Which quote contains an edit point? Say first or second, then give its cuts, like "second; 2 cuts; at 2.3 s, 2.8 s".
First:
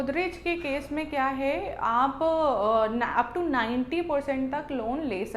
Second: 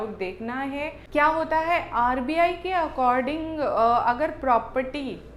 second; 1 cut; at 1.0 s